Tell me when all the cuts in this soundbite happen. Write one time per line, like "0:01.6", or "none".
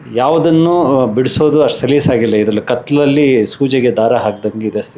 none